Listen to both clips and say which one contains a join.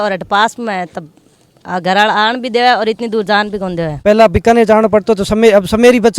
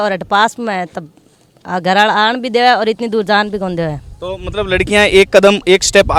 first; 1 cut; at 3.9 s

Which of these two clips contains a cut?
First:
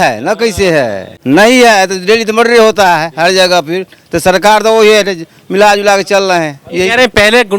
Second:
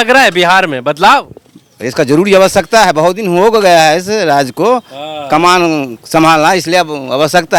first; 1 cut; at 1.1 s

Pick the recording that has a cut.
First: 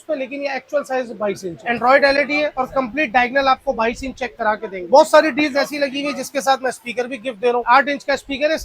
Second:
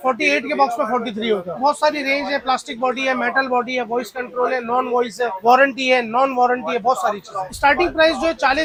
first; 3 cuts; at 1.5 s, 4.8 s, 7.6 s

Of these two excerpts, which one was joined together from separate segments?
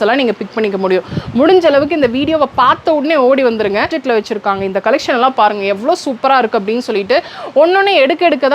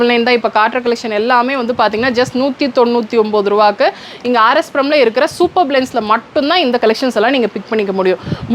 first; 1 cut; at 4.0 s

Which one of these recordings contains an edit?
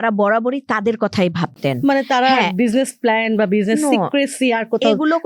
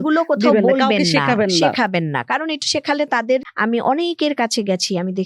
second; 1 cut; at 3.5 s

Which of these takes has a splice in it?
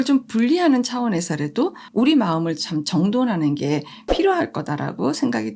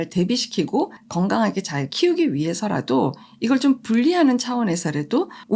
second; 1 cut; at 1.0 s

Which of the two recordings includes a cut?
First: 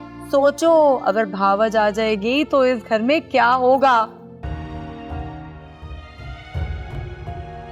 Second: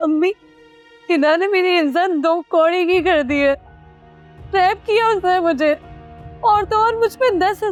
first; 1 cut; at 4.4 s

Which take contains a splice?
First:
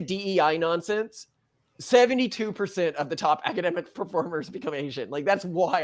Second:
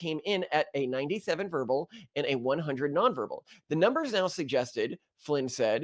second; 1 cut; at 3.5 s

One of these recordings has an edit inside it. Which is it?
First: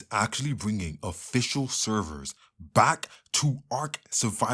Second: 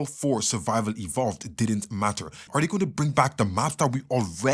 second; 1 cut; at 2.4 s

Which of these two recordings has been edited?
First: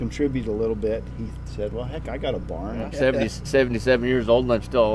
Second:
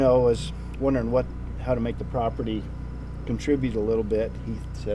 first; 1 cut; at 2.9 s

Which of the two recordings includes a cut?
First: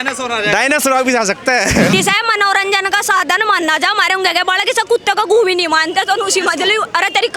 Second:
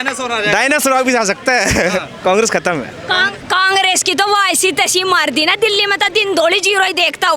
first; 1 cut; at 1.9 s

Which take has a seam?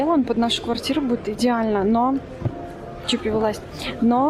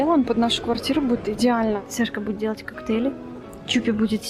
second; 1 cut; at 1.8 s

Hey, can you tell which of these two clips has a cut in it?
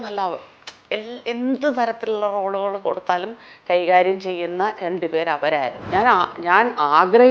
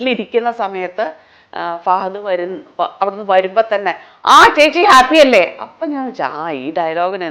first; 1 cut; at 5.8 s

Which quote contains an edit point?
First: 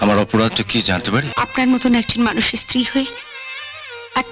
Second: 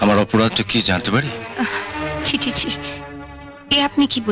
first; 1 cut; at 1.3 s

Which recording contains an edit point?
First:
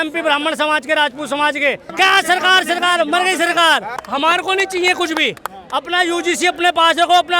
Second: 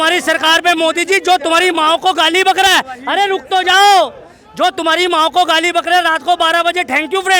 first; 2 cuts; at 1.8 s, 4.0 s

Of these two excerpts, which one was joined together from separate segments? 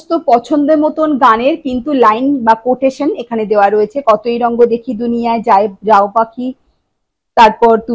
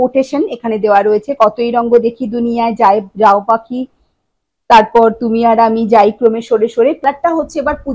second; 1 cut; at 7.0 s

